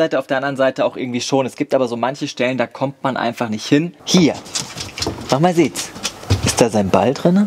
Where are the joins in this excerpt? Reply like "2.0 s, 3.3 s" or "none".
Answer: 4.0 s, 6.2 s